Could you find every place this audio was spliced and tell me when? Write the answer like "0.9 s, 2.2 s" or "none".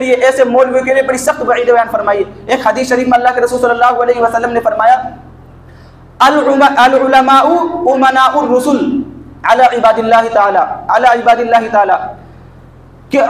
none